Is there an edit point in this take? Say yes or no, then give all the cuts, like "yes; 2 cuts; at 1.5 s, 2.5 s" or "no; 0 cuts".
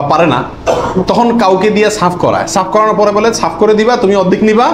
no; 0 cuts